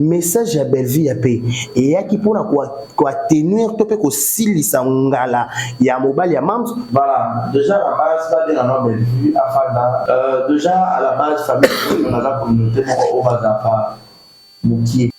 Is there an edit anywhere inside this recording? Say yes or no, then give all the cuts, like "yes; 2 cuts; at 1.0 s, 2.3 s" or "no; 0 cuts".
yes; 2 cuts; at 6.8 s, 10.0 s